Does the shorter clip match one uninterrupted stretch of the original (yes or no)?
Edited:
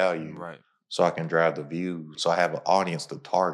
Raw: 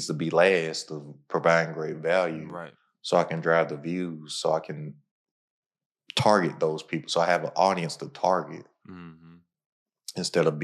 no